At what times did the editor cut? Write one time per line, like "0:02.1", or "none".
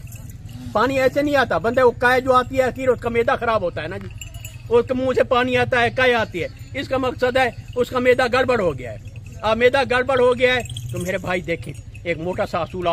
none